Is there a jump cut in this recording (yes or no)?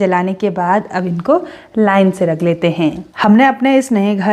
yes